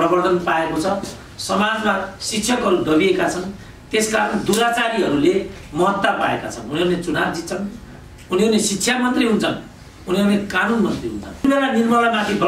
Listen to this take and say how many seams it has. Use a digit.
1